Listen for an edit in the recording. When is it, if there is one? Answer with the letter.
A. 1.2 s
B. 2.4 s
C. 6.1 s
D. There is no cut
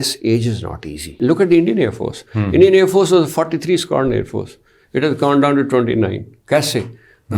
A